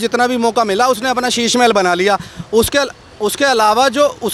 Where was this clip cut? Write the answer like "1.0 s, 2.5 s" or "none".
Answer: none